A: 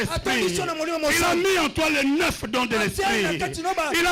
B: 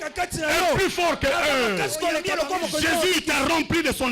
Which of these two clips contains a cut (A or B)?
B